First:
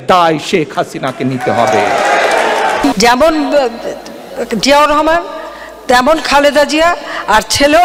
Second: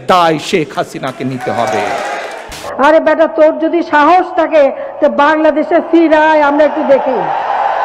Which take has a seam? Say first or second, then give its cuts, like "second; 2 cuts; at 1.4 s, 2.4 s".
second; 1 cut; at 2.6 s